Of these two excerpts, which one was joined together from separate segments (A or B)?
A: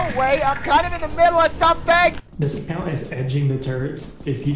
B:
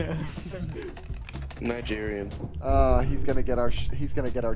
A